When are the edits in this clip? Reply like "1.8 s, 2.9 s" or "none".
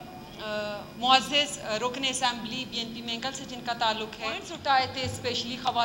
4.5 s